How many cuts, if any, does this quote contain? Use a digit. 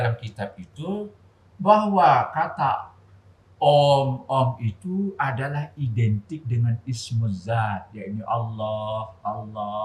0